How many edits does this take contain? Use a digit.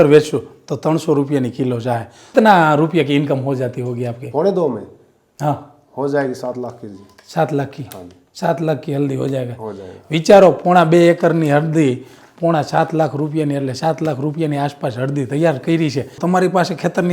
2